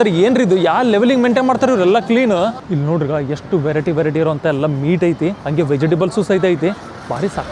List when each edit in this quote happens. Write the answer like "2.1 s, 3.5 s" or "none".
2.6 s

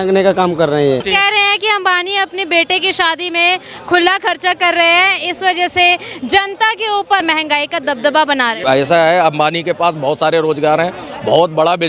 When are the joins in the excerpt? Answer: 1.1 s, 7.2 s, 8.6 s

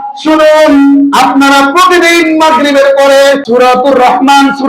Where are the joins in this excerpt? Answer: 3.4 s

